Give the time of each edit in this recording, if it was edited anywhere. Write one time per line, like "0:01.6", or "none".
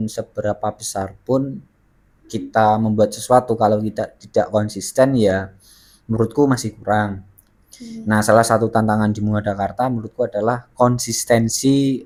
none